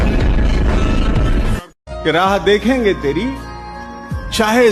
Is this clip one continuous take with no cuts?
yes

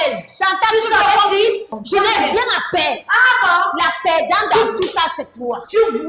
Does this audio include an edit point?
yes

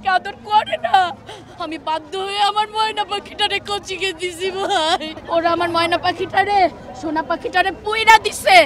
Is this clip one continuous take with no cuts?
no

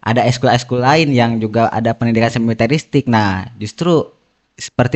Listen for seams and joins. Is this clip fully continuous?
yes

